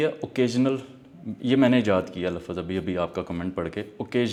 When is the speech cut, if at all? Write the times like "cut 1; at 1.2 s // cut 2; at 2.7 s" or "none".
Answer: none